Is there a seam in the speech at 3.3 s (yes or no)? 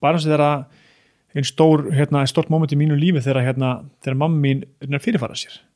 no